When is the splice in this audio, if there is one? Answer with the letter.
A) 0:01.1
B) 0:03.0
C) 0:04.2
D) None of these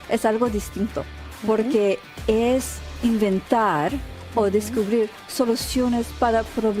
B